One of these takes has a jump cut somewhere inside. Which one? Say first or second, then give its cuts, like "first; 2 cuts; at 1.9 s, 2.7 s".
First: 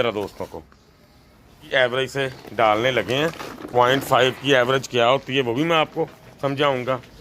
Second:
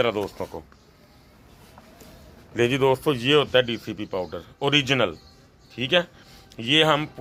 first; 1 cut; at 1.6 s